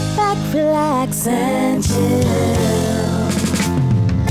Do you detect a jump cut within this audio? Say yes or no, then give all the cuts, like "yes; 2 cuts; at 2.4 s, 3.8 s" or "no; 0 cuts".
no; 0 cuts